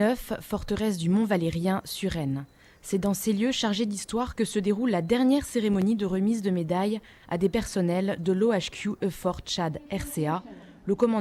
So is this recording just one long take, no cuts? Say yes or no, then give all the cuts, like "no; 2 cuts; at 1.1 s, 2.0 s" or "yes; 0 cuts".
yes; 0 cuts